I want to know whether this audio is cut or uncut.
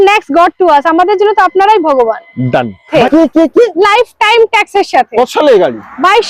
cut